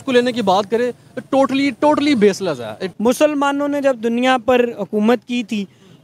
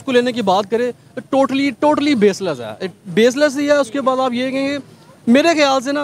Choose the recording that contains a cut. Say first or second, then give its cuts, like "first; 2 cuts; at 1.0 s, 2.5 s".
first; 1 cut; at 2.8 s